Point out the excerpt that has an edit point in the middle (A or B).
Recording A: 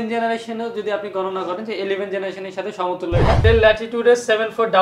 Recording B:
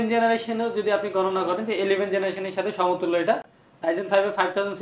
A